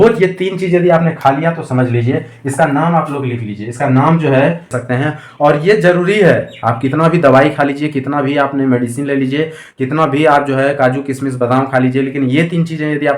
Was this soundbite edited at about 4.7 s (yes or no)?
yes